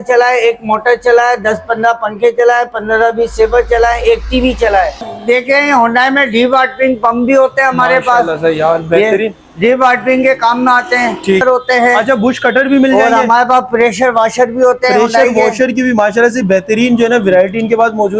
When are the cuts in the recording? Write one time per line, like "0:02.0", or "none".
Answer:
0:05.0
0:11.4

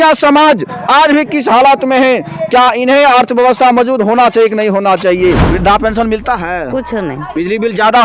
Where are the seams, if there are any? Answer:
0:05.4
0:07.3

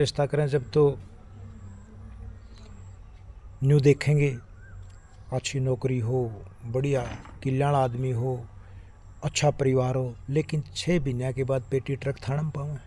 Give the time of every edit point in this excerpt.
none

